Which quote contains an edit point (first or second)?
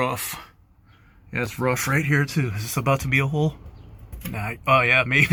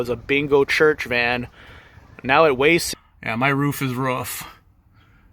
second